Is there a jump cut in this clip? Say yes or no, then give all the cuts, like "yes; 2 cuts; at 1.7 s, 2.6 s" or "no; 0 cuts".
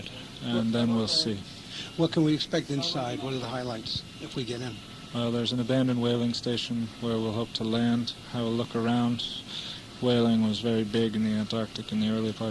yes; 1 cut; at 1.3 s